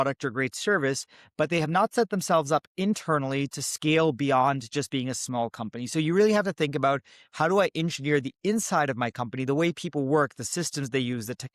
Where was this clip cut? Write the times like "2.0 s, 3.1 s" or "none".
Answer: none